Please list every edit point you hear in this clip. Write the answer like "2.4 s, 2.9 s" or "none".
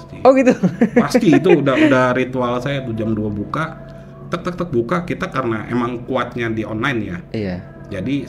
none